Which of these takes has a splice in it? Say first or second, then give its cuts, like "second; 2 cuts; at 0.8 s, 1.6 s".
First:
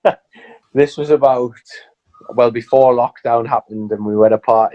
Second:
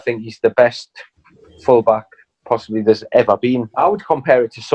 second; 1 cut; at 3.7 s